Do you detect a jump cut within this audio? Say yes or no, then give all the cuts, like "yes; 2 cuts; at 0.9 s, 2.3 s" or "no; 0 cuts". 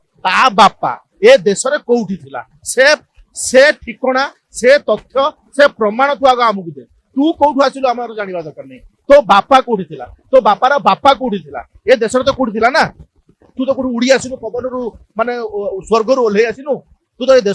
no; 0 cuts